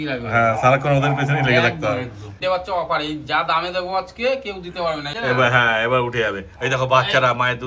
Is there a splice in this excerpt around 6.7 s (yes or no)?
no